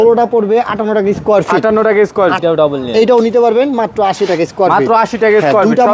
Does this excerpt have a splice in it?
yes; 1 cut; at 2.4 s

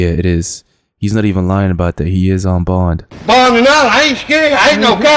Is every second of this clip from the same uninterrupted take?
no; 1 cut; at 3.1 s

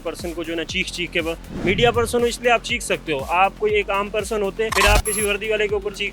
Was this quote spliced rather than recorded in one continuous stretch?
yes; 1 cut; at 4.7 s

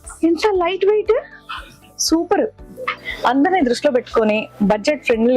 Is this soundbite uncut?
no; 1 cut; at 3.1 s

